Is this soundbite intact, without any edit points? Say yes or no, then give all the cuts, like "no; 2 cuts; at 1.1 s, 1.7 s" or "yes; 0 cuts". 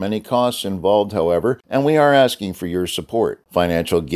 no; 1 cut; at 1.6 s